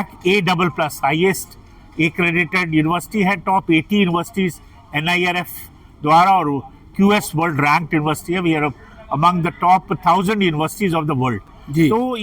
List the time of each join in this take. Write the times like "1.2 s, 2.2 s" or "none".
none